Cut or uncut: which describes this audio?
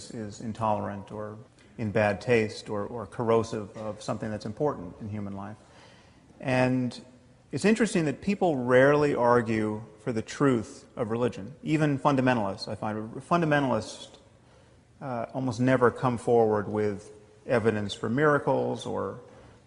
cut